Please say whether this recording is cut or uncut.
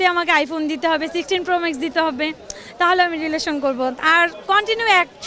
uncut